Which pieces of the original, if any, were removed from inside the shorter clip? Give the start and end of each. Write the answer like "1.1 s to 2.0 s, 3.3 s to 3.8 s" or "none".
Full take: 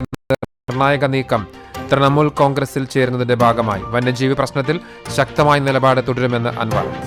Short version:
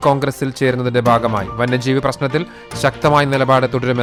none